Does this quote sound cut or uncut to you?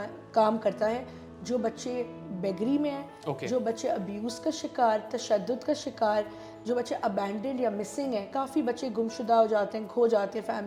uncut